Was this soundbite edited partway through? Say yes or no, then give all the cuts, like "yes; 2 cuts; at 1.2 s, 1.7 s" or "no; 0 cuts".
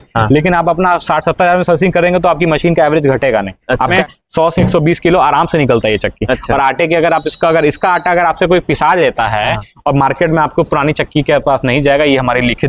yes; 1 cut; at 3.9 s